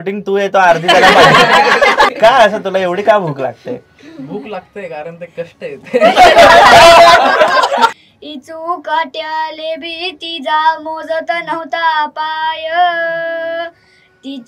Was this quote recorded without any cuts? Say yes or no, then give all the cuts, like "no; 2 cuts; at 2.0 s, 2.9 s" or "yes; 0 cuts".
no; 2 cuts; at 2.1 s, 7.9 s